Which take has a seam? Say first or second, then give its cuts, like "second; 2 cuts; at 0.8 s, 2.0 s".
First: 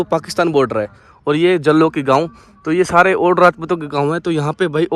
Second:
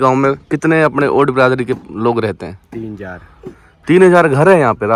first; 1 cut; at 1.1 s